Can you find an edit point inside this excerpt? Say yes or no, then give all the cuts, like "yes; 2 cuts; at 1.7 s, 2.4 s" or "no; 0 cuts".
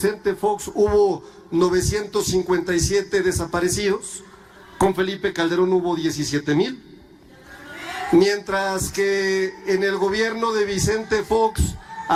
no; 0 cuts